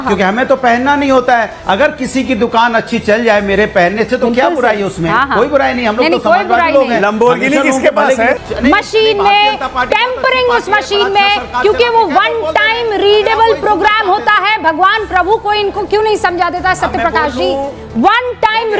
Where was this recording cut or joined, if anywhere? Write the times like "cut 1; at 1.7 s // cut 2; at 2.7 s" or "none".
cut 1; at 8.4 s